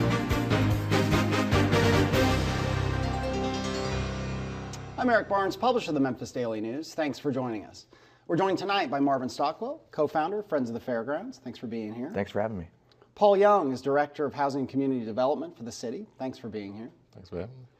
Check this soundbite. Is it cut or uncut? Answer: uncut